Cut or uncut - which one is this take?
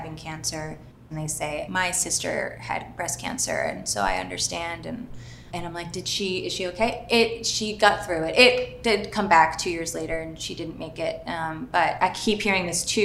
uncut